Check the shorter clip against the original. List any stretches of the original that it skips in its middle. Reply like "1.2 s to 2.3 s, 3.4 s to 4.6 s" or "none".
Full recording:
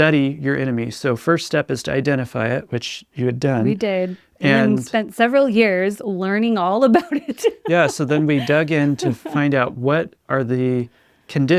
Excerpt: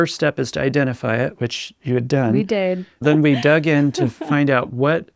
4.3 s to 8.0 s